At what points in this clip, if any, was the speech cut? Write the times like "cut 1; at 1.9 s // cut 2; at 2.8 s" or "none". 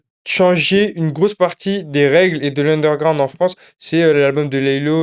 none